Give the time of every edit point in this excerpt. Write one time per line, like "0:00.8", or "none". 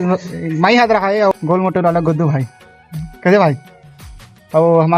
0:01.3
0:03.1